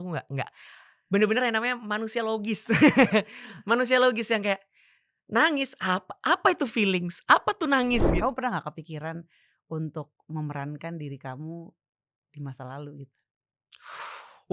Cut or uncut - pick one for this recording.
cut